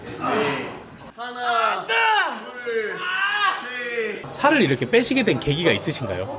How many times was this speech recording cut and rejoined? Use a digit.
2